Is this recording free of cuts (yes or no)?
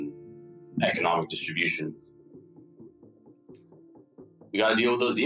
yes